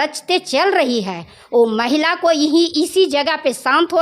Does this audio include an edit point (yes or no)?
no